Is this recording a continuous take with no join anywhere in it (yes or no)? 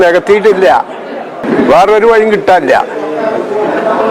no